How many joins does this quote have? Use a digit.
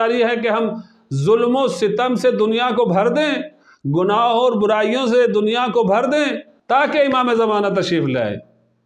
0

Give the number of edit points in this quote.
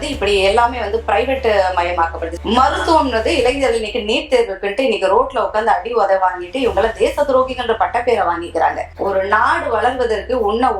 1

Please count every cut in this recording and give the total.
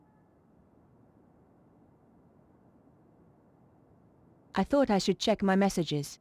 1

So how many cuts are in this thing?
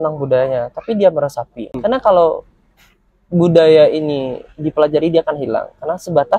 1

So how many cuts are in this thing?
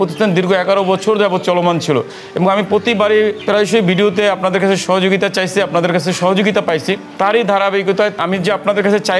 0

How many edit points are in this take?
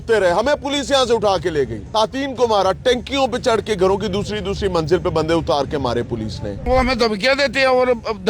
2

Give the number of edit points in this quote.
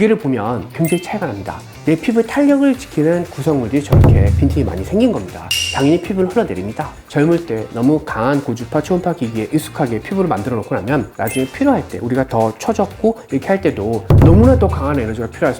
1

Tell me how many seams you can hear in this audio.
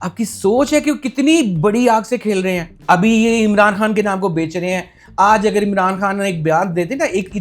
1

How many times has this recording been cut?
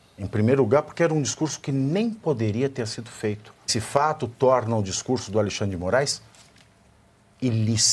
1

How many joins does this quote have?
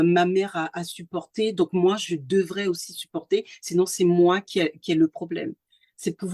0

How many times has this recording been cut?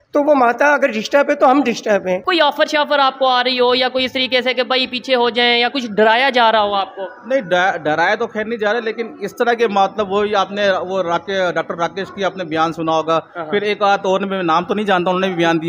1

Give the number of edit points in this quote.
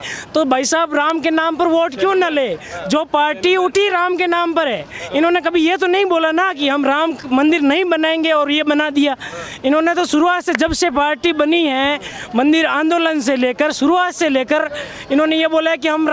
0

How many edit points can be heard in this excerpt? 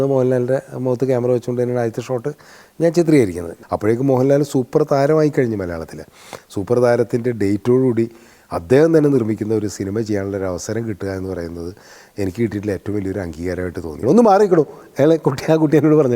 2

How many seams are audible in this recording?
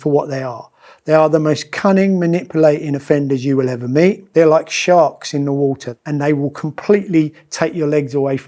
2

